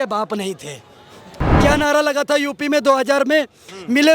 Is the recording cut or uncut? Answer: cut